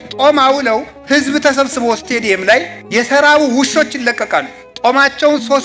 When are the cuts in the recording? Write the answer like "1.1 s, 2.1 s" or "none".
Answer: 0.9 s, 2.8 s, 4.6 s